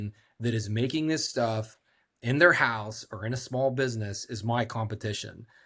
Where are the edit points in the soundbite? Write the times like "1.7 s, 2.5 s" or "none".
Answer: none